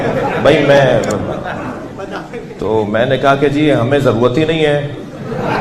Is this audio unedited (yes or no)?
yes